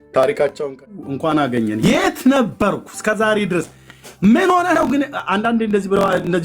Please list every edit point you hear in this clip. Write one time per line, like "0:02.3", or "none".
0:00.9

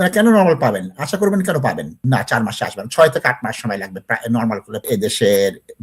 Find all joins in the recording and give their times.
0:01.9
0:04.8

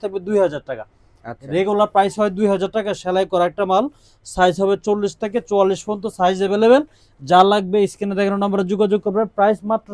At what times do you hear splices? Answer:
none

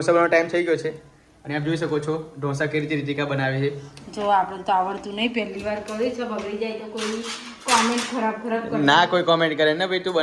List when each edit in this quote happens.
none

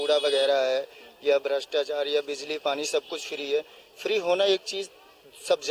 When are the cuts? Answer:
none

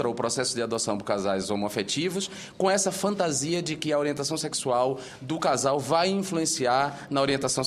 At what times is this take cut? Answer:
none

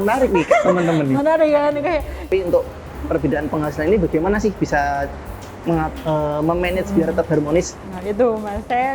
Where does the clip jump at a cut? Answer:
0:02.2

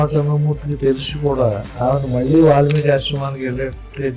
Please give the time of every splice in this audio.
0:01.7

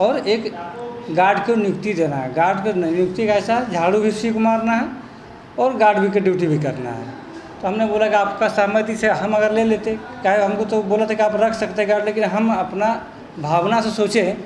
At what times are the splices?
none

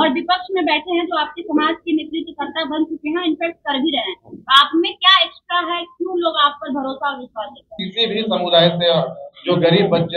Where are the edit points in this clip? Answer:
0:07.9

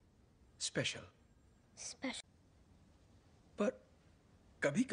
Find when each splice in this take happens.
none

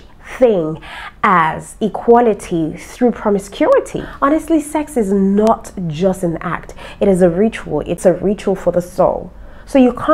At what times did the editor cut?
0:04.0
0:08.0

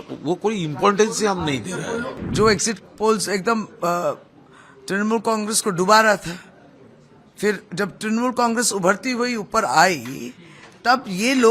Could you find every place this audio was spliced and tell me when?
0:02.1

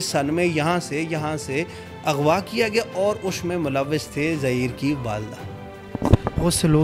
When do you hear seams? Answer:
none

